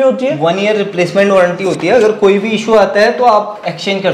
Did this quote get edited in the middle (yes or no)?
no